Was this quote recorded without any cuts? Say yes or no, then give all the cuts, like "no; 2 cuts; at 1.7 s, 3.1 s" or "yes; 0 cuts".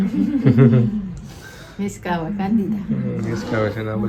yes; 0 cuts